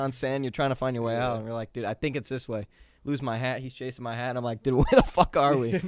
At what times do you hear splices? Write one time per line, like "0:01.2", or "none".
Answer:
none